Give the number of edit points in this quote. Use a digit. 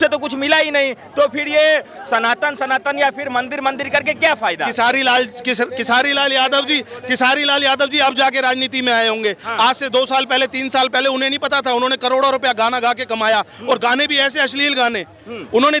0